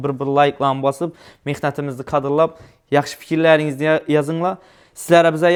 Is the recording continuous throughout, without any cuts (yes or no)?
yes